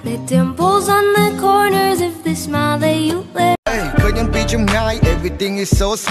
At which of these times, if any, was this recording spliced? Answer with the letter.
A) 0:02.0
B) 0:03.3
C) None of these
B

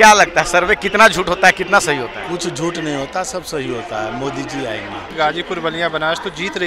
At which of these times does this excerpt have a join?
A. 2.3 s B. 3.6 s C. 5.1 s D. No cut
C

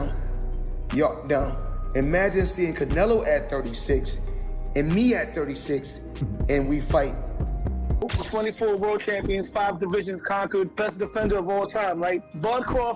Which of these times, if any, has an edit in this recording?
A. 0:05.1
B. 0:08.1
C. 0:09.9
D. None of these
B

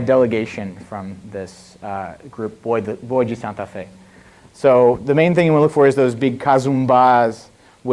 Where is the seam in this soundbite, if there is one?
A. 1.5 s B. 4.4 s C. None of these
A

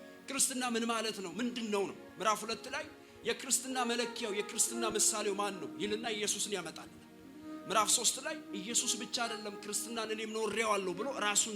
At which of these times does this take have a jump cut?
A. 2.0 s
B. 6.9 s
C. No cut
A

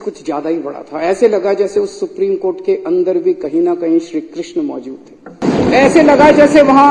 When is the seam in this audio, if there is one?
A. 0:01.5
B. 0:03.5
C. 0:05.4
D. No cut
C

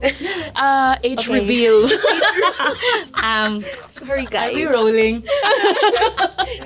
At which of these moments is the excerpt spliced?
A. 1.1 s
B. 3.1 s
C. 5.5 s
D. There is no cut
D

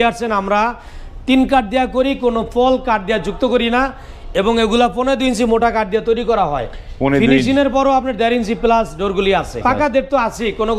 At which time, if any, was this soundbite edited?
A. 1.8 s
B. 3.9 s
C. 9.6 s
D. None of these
C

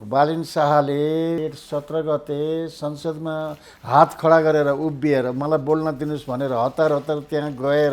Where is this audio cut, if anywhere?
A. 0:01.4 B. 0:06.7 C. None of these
A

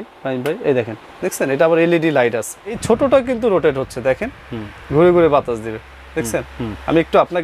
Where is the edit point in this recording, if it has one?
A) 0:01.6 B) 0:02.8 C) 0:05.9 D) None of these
B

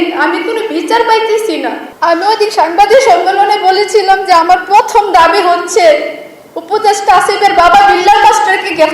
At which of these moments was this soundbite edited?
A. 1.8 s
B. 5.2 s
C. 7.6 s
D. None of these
A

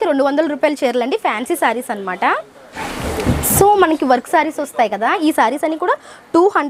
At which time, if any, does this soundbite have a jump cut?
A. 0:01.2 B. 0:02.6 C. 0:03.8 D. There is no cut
D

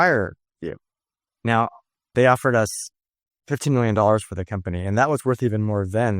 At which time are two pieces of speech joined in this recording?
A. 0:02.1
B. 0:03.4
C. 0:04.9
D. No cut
A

